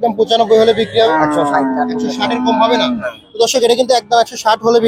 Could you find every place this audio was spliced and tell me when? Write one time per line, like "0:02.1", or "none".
0:01.1